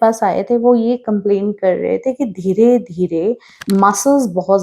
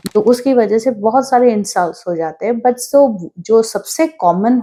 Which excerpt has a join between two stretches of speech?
first; 1 cut; at 3.5 s

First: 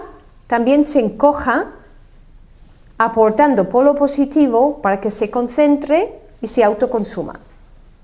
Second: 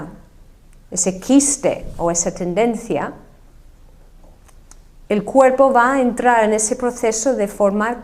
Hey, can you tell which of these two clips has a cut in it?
second; 1 cut; at 2.2 s

